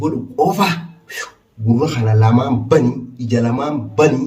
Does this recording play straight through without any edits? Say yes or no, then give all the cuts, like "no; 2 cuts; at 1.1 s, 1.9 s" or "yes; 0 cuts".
yes; 0 cuts